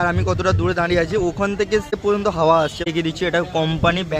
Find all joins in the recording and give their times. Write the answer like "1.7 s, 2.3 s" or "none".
2.0 s, 2.9 s